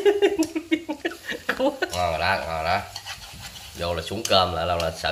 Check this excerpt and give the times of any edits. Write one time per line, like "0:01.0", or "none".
0:01.9